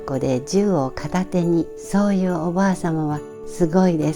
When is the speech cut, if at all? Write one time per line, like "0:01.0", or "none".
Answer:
none

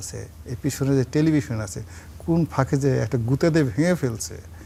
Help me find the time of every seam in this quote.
none

